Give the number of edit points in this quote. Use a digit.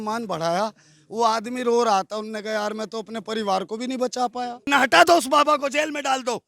1